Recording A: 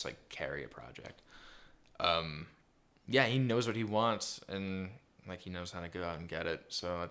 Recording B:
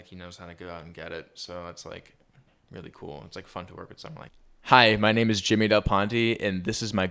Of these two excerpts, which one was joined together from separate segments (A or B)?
B